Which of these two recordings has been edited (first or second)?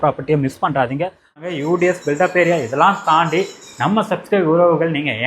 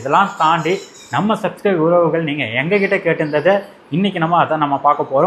first